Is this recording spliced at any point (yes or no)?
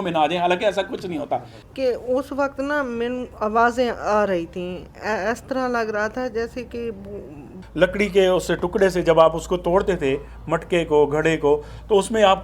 yes